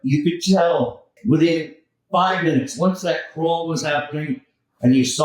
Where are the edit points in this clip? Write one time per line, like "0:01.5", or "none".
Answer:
0:01.1